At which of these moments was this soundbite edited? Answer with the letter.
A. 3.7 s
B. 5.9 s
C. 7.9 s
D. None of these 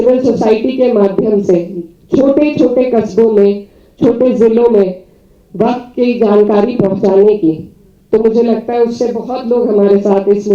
D